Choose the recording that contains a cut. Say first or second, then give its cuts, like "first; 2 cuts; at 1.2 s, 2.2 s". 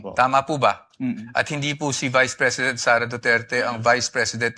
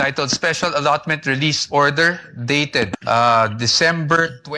second; 1 cut; at 3.0 s